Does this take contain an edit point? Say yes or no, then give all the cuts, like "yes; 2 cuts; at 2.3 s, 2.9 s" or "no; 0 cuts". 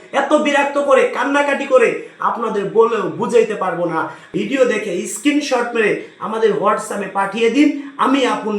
yes; 1 cut; at 4.3 s